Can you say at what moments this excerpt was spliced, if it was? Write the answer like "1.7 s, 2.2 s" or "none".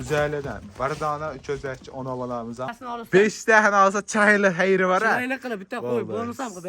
2.7 s